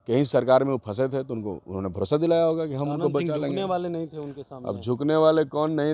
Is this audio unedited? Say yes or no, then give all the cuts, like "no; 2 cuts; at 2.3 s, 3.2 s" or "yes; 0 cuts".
yes; 0 cuts